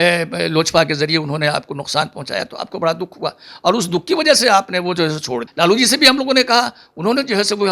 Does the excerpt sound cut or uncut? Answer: cut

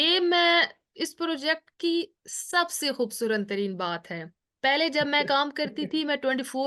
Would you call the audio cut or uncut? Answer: uncut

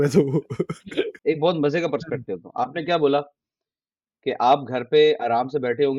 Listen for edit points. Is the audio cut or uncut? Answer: cut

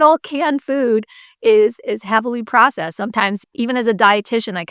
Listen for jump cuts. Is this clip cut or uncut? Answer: cut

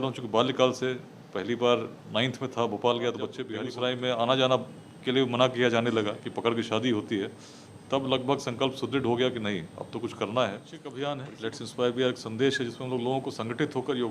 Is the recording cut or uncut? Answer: cut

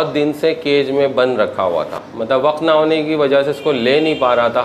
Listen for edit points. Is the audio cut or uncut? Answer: uncut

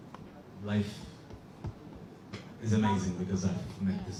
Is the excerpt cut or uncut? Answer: uncut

